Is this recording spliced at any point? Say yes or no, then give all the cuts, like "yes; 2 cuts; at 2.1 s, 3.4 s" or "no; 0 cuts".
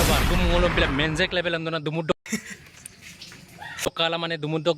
no; 0 cuts